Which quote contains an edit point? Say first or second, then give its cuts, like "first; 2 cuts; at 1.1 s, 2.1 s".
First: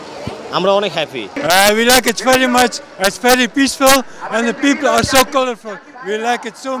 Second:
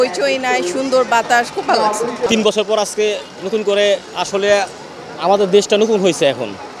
first; 1 cut; at 1.3 s